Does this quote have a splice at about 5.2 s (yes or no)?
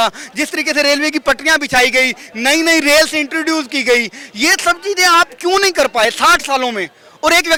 no